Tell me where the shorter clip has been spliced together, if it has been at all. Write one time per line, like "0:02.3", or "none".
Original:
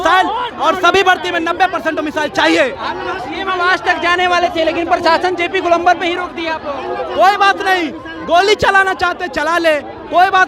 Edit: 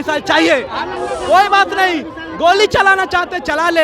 0:00.9

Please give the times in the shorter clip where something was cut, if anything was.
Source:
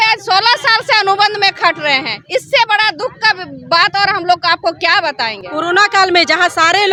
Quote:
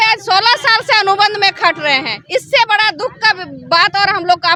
none

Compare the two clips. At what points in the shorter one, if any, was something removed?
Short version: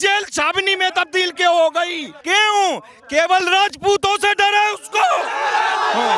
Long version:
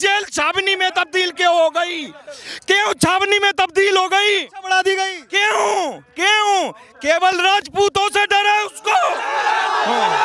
0:02.1

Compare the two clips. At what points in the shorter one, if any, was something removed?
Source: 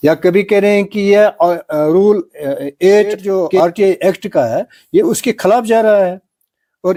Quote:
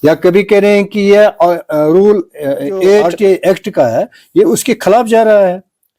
0:03.0

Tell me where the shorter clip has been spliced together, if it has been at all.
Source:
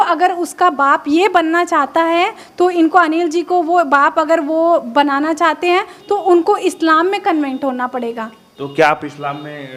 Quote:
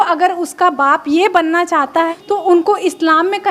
0:02.1

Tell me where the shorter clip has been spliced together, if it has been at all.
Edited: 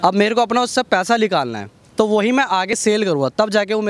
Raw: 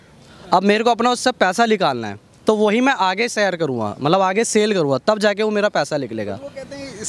0:02.8

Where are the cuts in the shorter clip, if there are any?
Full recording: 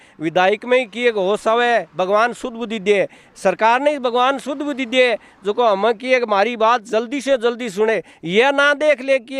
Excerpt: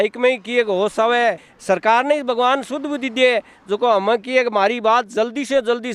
0:01.4

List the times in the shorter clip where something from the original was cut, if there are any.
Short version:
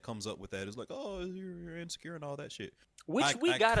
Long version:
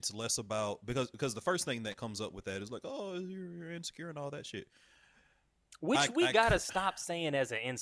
0:02.9

